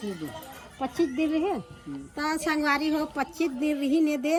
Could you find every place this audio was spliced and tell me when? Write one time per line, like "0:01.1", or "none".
none

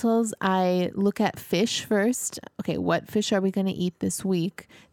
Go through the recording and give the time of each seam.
none

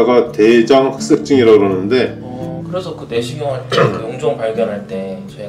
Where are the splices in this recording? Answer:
0:02.5

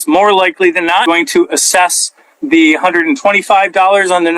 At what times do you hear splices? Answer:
0:01.1

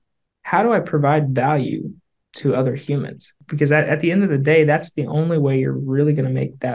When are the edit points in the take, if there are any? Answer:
0:03.4

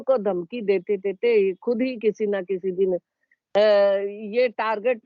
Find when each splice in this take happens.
none

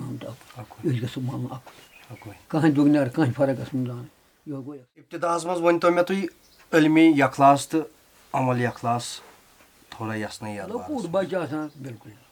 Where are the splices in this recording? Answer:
0:05.2
0:10.7

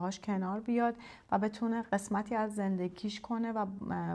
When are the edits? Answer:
none

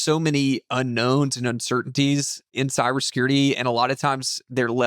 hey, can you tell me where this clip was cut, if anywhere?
0:02.5

